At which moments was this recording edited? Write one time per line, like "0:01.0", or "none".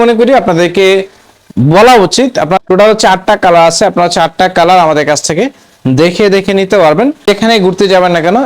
0:02.6
0:07.2